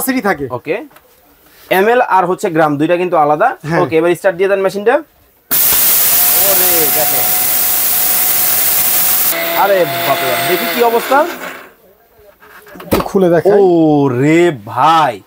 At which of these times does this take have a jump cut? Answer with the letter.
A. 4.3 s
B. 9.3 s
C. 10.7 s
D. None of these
B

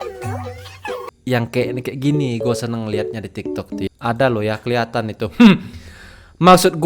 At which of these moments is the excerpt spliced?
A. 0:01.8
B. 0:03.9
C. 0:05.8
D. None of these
B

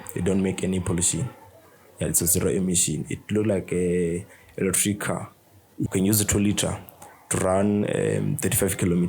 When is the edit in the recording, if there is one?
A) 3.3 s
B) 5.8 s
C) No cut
B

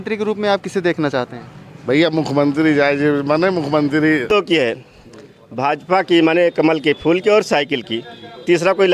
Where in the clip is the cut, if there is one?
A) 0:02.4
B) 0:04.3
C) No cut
B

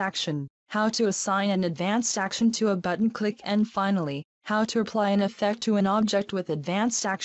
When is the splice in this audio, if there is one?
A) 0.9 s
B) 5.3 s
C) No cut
A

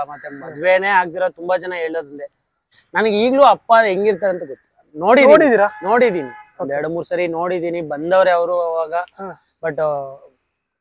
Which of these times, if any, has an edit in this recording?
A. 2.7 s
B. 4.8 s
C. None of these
A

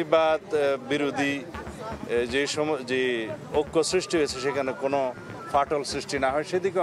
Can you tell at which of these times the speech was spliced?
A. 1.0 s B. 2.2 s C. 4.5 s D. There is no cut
D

